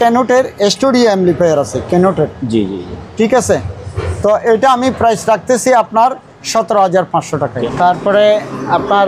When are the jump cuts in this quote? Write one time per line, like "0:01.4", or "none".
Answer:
0:07.5